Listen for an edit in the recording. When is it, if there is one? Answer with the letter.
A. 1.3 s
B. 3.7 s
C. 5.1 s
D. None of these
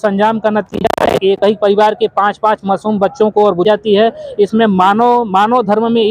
B